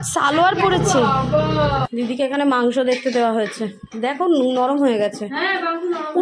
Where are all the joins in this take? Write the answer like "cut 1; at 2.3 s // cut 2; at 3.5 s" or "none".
cut 1; at 1.9 s